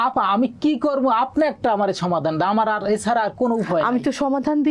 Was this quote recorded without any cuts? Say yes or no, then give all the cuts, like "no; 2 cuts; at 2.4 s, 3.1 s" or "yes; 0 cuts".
yes; 0 cuts